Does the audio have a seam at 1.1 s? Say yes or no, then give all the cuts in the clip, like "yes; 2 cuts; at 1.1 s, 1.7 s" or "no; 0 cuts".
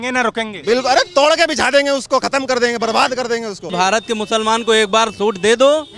no; 1 cut; at 3.7 s